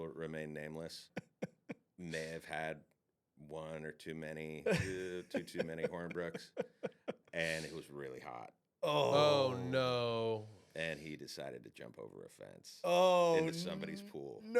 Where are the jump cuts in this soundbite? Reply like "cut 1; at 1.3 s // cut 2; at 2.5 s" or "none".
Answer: cut 1; at 1.0 s // cut 2; at 7.2 s